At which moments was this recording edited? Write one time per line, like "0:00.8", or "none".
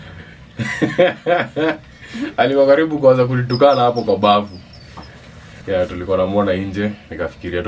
none